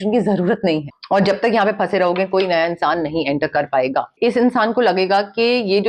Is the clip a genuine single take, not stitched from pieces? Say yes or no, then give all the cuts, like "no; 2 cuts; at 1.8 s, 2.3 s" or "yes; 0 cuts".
no; 2 cuts; at 1.0 s, 4.1 s